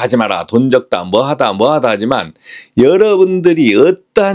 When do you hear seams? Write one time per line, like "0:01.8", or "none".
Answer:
none